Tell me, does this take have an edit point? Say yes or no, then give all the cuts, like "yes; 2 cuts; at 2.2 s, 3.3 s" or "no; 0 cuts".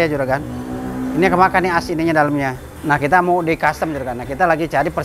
yes; 1 cut; at 2.7 s